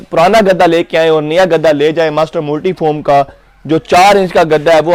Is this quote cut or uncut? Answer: uncut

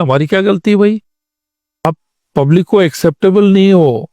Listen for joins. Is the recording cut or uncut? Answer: cut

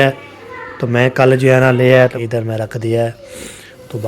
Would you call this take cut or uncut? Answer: cut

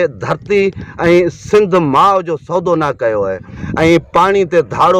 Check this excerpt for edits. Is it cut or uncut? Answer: cut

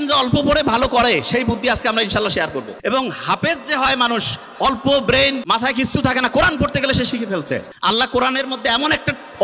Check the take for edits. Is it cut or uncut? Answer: cut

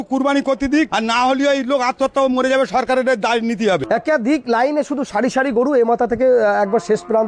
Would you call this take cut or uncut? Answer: cut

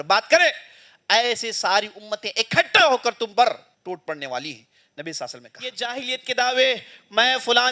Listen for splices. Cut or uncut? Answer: cut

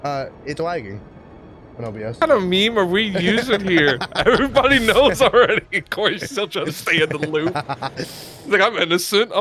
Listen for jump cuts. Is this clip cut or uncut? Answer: cut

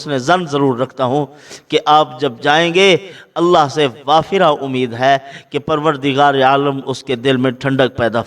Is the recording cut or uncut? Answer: uncut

